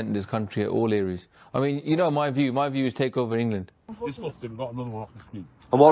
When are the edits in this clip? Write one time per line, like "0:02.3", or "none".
0:03.8